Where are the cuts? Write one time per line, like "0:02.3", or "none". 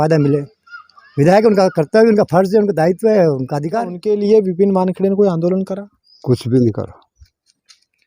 0:03.9